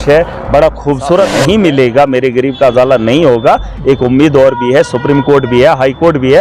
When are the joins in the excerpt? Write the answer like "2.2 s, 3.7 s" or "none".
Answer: 1.1 s